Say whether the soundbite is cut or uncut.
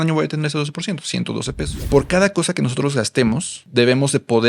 cut